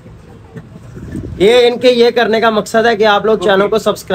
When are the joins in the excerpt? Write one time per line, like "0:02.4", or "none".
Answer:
none